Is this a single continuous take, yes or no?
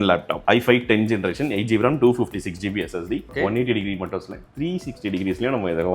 no